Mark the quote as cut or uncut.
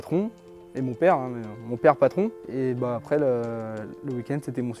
cut